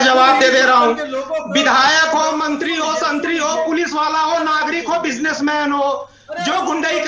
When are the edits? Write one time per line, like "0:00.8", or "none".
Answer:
none